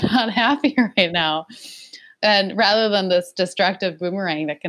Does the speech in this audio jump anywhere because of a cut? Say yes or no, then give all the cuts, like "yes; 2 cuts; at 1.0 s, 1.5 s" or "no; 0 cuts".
yes; 1 cut; at 2.0 s